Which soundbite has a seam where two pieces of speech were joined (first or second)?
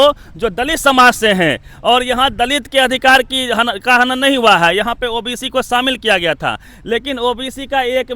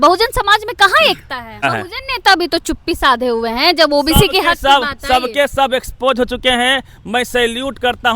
second